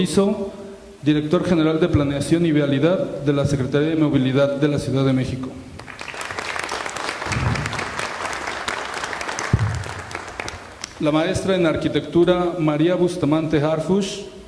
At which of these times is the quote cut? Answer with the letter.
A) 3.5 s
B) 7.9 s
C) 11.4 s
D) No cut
C